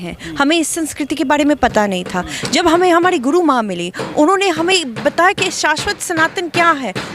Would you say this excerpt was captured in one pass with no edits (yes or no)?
yes